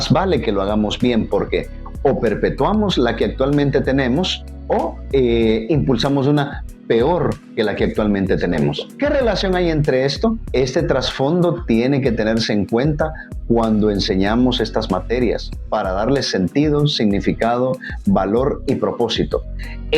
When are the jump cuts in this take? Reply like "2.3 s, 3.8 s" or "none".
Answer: 5.0 s, 8.8 s